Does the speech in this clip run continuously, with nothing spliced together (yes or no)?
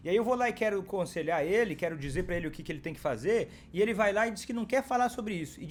yes